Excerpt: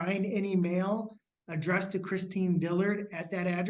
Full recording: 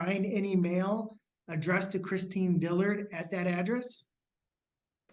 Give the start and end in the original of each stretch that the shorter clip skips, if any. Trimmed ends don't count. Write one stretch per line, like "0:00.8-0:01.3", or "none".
none